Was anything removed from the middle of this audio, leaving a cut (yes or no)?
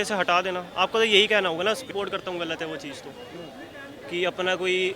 yes